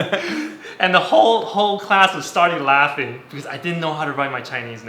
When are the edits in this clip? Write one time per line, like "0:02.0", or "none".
0:03.2